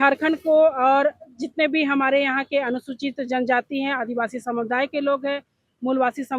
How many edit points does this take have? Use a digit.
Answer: 0